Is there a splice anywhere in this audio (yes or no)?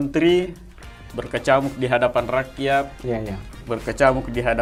no